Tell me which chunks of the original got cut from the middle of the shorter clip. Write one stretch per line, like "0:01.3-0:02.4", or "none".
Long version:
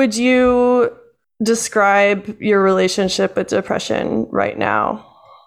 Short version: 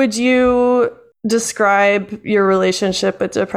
0:01.1-0:01.2